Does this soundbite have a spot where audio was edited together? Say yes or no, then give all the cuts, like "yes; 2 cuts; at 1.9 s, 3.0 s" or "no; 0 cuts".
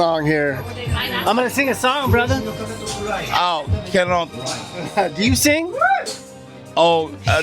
no; 0 cuts